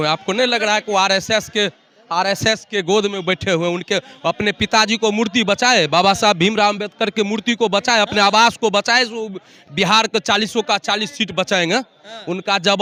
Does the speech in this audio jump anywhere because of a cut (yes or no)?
no